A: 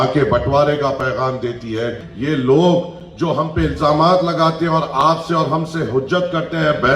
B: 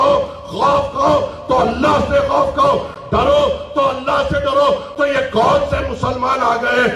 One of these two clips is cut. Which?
A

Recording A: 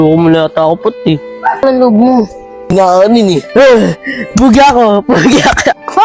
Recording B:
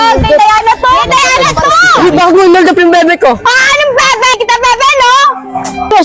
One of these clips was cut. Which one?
B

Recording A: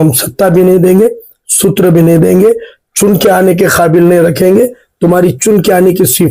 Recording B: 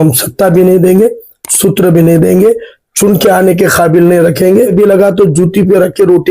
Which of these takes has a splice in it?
B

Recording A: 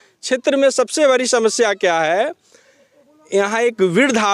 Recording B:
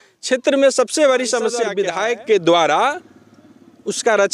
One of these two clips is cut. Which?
B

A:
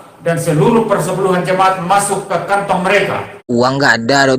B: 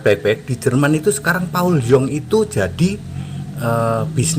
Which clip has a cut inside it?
A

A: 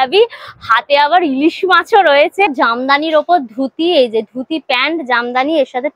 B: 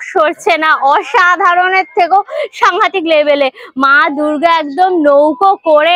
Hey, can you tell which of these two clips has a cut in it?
A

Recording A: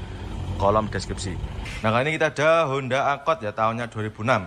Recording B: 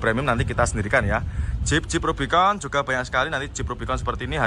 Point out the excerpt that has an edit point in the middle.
A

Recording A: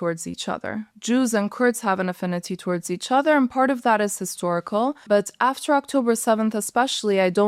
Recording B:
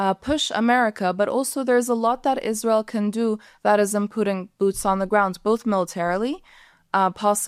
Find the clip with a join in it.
A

